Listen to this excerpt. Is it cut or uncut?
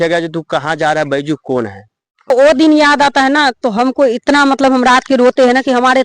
cut